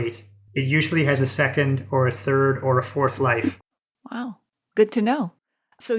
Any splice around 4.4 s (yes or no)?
no